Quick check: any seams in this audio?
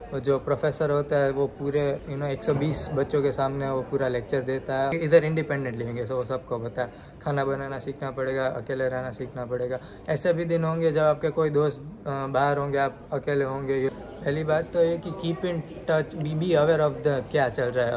yes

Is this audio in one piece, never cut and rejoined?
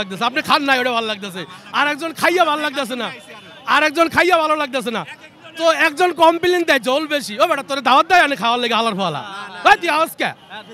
yes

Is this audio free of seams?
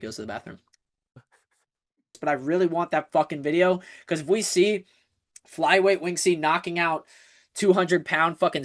no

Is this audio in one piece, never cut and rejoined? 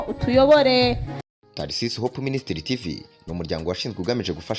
no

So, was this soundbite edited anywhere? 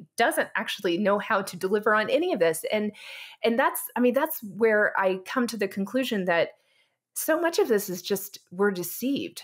no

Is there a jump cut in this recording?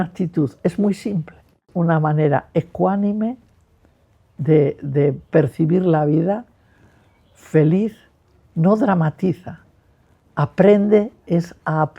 yes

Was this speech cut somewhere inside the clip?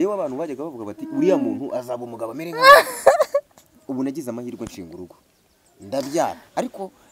no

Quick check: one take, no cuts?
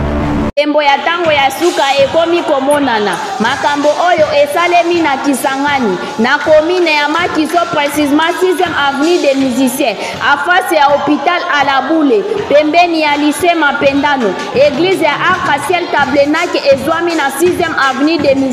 yes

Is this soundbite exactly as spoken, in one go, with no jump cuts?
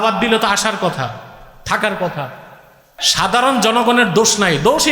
no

